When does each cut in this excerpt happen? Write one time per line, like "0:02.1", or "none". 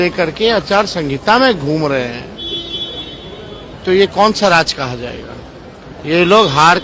0:03.7
0:05.8